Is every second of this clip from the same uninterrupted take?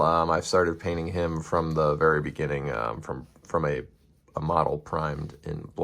yes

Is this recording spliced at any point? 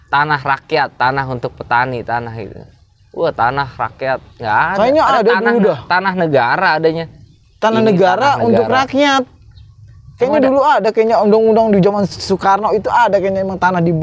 no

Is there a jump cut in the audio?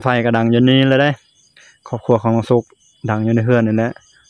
no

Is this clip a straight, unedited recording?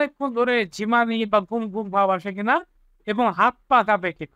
yes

